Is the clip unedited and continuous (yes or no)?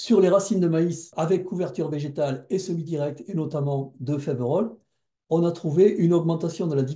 no